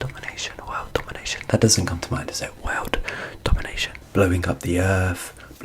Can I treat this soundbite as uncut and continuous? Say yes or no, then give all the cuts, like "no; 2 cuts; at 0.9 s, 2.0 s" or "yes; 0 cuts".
no; 1 cut; at 3.9 s